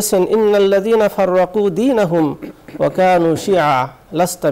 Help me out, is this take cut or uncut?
uncut